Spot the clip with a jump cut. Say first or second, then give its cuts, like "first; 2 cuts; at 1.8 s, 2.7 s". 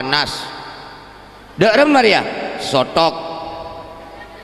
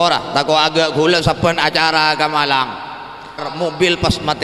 second; 1 cut; at 3.5 s